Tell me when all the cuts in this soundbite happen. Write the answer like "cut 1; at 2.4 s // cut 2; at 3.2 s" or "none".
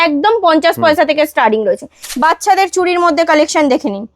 cut 1; at 2.0 s